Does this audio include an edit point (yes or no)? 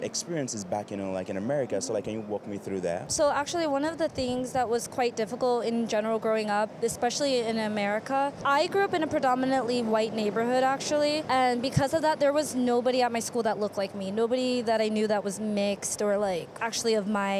no